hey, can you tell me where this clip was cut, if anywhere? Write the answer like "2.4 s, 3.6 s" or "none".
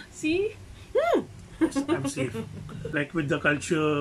2.7 s